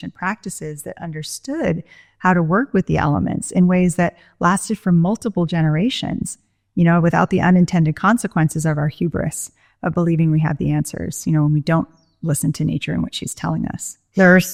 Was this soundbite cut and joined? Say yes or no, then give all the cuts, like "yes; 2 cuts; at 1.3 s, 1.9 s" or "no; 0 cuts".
no; 0 cuts